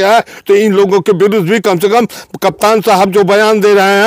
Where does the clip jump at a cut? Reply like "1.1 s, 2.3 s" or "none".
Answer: none

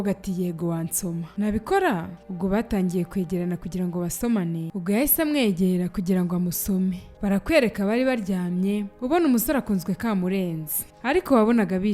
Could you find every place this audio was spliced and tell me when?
4.7 s, 10.9 s

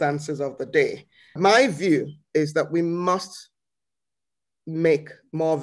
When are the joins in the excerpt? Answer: 1.4 s

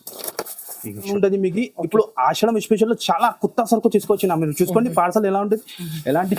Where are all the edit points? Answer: 1.1 s

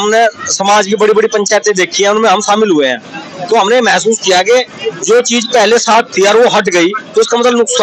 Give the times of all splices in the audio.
none

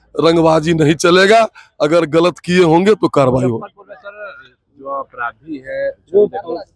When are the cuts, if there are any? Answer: none

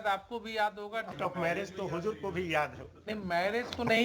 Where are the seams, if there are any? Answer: 1.1 s

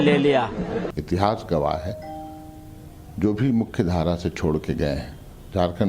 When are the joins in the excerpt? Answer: 3.4 s

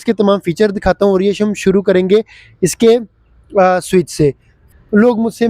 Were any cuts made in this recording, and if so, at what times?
4.6 s

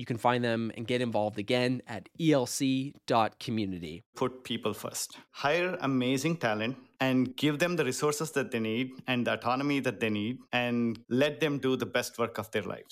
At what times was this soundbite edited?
4.1 s, 5.2 s, 7.3 s, 10.6 s

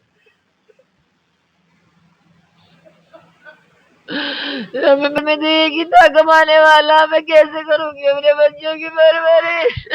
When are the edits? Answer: 5.2 s

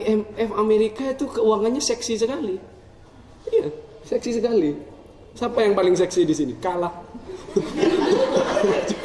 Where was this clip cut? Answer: none

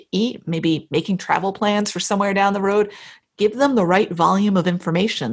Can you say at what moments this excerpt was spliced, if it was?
3.0 s

